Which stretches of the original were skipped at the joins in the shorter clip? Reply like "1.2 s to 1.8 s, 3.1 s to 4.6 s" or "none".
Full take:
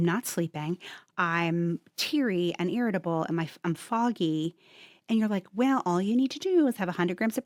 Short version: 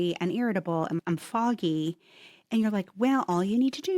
3.4 s to 3.6 s